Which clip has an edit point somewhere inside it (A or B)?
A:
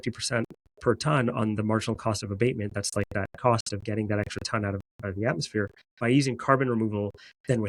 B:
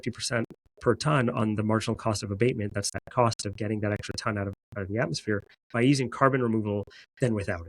B